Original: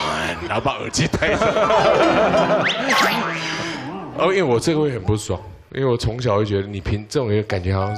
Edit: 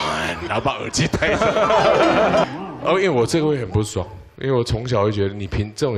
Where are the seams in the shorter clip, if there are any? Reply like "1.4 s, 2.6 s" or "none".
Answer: 2.5 s